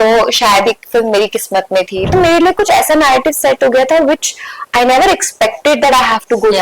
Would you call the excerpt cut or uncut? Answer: cut